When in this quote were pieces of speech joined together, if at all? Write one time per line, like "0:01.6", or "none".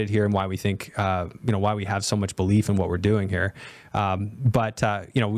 none